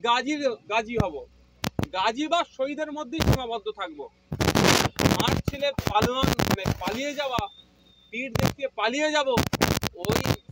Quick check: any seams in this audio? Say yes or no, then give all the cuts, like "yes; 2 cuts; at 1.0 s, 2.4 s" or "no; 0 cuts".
no; 0 cuts